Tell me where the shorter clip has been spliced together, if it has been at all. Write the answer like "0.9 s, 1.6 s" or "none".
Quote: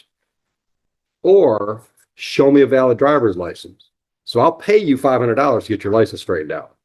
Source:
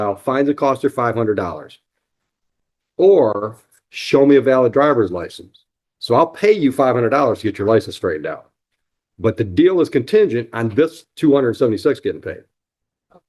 none